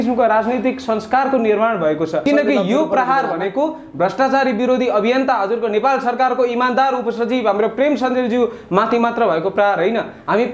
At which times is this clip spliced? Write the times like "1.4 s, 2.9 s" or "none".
2.2 s